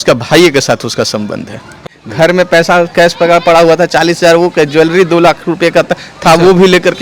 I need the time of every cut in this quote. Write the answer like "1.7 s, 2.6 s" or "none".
1.9 s